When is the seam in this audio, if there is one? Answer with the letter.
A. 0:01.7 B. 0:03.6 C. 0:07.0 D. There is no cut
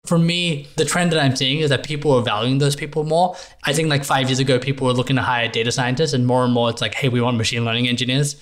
D